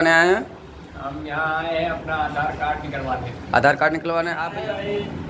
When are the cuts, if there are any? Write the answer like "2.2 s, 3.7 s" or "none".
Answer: 4.3 s